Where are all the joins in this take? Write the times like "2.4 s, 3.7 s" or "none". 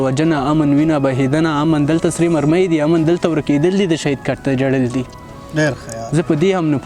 none